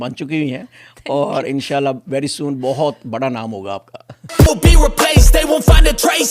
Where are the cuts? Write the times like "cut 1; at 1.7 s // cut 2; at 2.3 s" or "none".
cut 1; at 4.4 s